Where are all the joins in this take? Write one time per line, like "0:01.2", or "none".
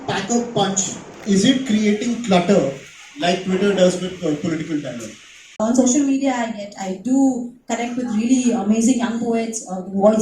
0:01.1
0:05.6